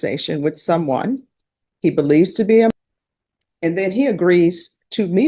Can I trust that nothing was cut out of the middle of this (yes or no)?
no